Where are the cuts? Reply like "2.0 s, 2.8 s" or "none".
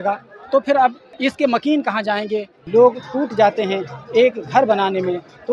1.1 s, 2.6 s